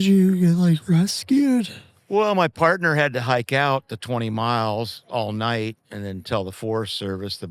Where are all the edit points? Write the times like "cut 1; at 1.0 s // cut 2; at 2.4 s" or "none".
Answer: none

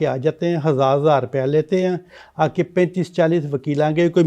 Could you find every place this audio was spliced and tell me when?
none

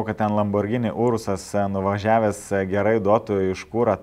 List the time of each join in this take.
none

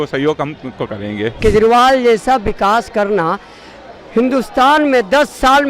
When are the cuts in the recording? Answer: cut 1; at 1.4 s

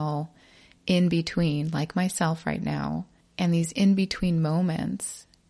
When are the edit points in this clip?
cut 1; at 3.2 s

